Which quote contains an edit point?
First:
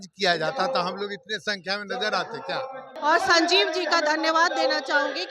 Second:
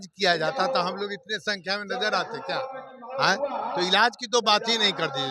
first; 1 cut; at 3.0 s

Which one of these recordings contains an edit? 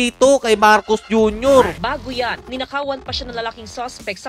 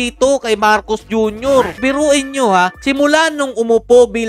first; 1 cut; at 1.7 s

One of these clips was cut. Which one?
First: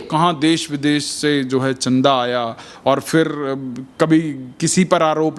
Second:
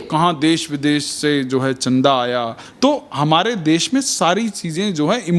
second; 1 cut; at 2.6 s

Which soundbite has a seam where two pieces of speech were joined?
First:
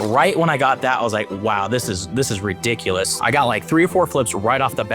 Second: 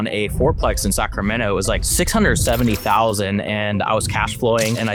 first; 1 cut; at 3.1 s

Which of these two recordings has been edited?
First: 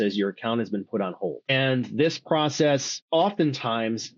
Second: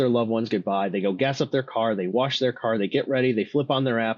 first; 2 cuts; at 1.5 s, 3.0 s

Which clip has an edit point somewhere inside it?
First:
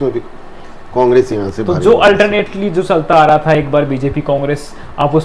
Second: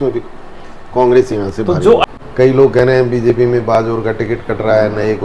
second; 1 cut; at 2.0 s

